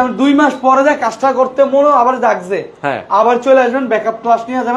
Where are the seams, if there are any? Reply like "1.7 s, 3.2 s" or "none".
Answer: none